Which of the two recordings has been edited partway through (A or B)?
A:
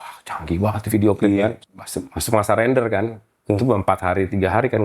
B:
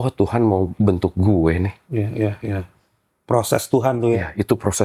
A